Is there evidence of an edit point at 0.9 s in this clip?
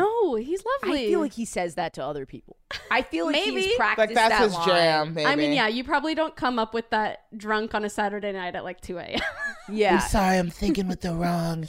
yes; 1 cut; at 0.9 s

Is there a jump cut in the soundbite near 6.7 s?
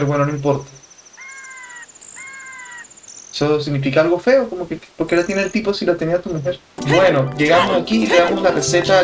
yes; 1 cut; at 6.7 s

